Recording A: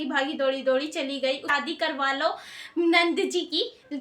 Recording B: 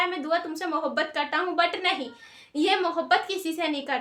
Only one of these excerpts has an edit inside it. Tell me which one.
A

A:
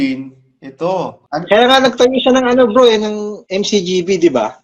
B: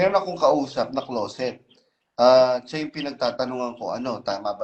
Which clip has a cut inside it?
A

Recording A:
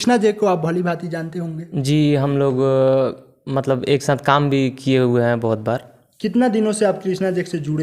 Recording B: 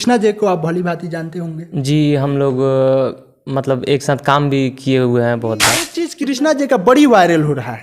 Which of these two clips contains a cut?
B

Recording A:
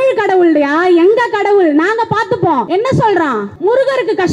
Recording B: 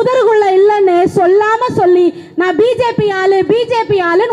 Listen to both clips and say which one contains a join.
A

